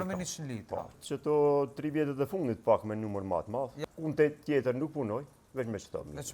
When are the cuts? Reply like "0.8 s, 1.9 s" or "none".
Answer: 1.0 s, 3.7 s